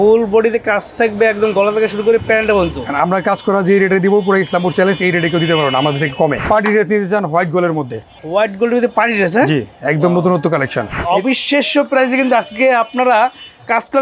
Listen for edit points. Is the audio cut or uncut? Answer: cut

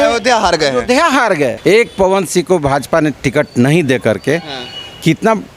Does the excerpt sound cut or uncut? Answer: cut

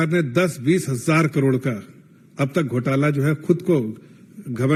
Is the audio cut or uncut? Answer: uncut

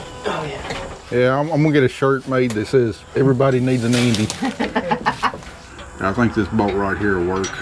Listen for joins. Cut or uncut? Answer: cut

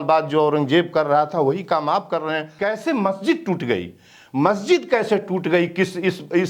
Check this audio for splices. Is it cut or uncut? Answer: cut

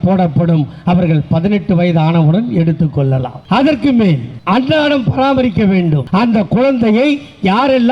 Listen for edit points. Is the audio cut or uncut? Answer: cut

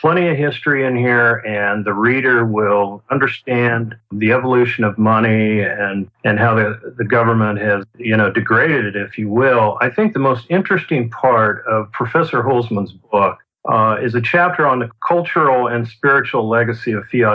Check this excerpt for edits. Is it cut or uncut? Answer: cut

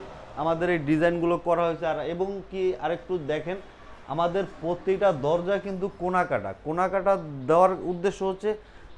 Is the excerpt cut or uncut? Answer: uncut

